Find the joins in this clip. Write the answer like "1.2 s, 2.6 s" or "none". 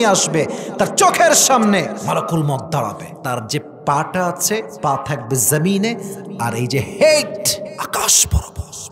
2.0 s, 3.1 s, 4.7 s, 7.7 s